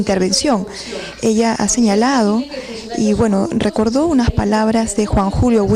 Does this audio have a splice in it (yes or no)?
yes